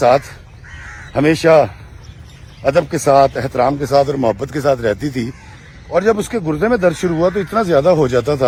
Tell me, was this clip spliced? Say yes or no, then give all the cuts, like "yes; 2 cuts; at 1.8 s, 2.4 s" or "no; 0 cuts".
no; 0 cuts